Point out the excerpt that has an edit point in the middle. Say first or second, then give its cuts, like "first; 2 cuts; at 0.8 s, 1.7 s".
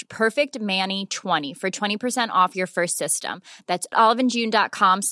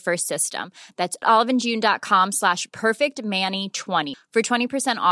first; 1 cut; at 1.5 s